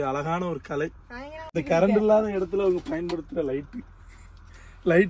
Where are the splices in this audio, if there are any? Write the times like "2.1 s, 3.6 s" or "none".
1.0 s